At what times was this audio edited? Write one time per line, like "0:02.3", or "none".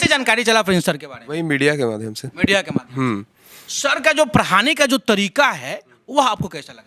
none